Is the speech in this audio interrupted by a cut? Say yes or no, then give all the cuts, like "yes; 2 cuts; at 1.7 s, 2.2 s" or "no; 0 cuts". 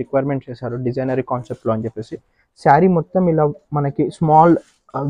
no; 0 cuts